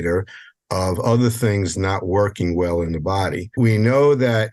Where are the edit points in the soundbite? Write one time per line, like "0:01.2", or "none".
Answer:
0:03.5

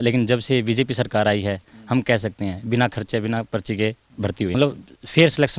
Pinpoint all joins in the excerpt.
0:04.5

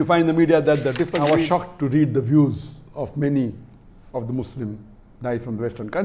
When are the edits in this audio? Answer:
0:01.2

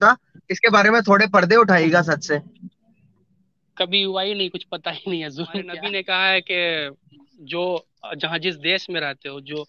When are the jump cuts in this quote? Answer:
0:05.8

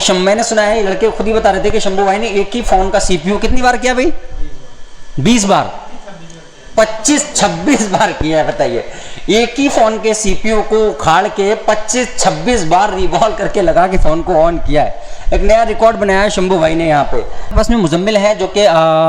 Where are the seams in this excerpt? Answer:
0:17.5

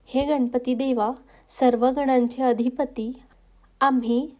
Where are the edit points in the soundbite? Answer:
0:03.2

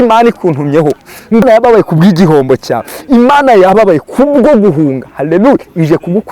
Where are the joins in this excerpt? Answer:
0:01.4

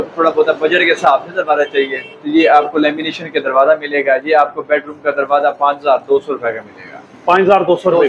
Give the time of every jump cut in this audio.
none

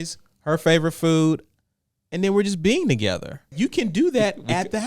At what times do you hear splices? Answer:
0:03.4

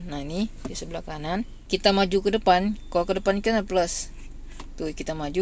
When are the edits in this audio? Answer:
0:01.6

